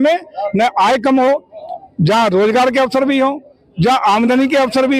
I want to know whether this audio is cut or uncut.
uncut